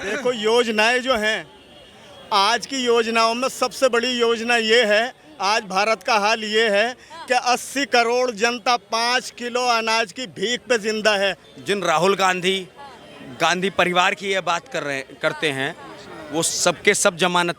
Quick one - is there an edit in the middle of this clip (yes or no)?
yes